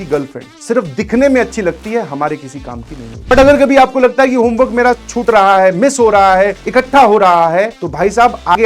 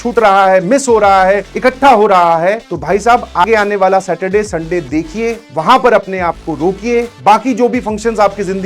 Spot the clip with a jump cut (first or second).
first